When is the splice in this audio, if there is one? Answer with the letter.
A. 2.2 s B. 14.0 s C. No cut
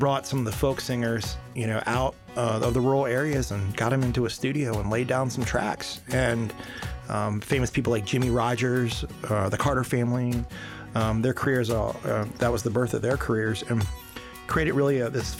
C